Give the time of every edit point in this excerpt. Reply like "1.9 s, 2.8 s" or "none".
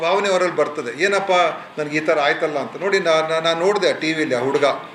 none